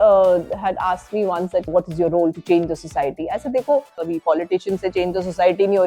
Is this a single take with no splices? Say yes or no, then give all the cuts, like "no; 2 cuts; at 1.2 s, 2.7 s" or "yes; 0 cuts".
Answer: no; 2 cuts; at 1.7 s, 4.1 s